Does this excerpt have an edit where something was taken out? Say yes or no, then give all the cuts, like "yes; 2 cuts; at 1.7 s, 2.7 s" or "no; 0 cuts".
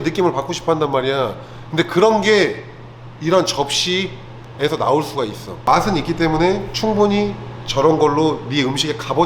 no; 0 cuts